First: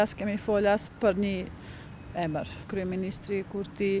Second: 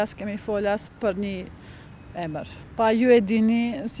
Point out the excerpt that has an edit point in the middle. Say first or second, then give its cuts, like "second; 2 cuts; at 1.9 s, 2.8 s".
first; 1 cut; at 2.7 s